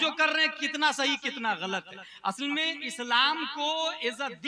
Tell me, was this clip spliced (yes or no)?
no